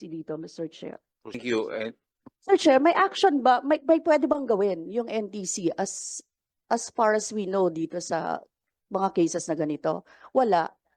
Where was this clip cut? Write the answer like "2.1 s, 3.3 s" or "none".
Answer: 1.4 s